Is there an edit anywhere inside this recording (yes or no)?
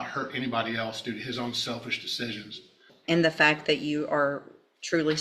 yes